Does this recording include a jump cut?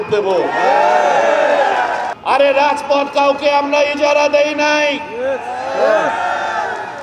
yes; 1 cut; at 2.1 s

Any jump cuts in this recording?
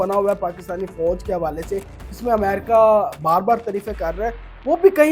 no; 0 cuts

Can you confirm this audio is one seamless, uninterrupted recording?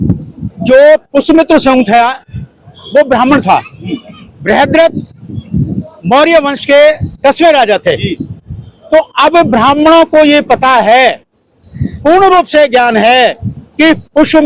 yes; 0 cuts

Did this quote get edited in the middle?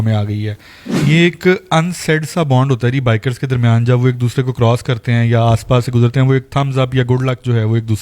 yes; 1 cut; at 0.9 s

